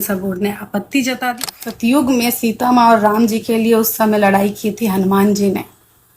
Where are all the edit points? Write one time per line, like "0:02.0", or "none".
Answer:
0:01.5